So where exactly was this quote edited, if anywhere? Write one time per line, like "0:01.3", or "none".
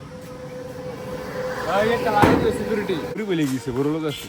0:03.2